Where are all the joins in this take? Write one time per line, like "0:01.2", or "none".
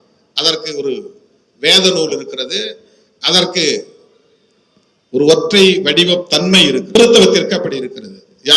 0:07.0